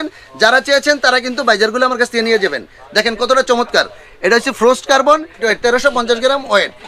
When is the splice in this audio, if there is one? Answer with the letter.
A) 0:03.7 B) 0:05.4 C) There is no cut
B